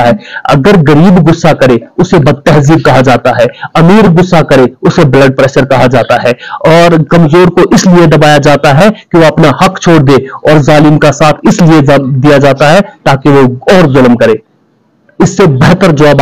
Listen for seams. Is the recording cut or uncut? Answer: uncut